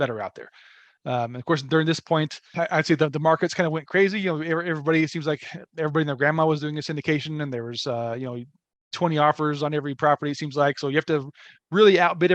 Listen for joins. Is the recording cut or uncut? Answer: cut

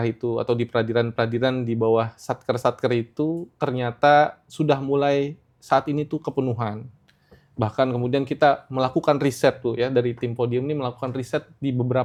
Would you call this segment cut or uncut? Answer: uncut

